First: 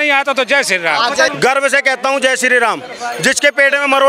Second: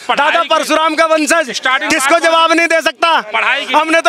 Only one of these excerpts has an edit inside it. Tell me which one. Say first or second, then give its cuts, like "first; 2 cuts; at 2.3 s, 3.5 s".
first; 1 cut; at 1.3 s